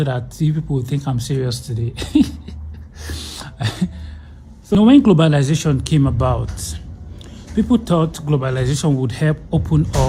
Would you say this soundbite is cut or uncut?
cut